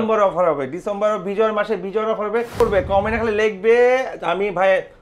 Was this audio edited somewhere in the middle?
yes; 1 cut; at 2.6 s

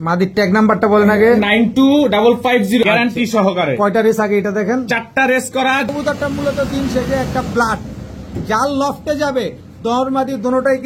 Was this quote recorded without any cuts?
no; 2 cuts; at 2.8 s, 5.9 s

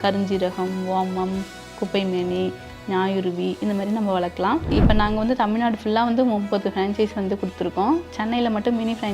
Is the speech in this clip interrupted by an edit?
yes; 1 cut; at 4.7 s

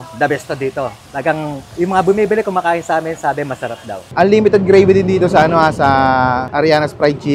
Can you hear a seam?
yes; 1 cut; at 4.0 s

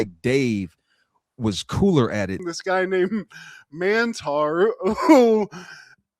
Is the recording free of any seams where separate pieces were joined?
no; 1 cut; at 2.4 s

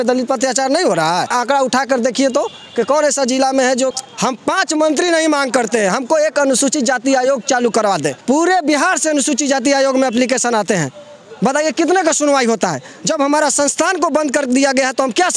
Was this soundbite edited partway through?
yes; 3 cuts; at 1.3 s, 3.9 s, 8.1 s

